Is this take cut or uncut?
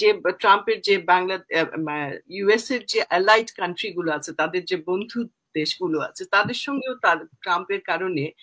uncut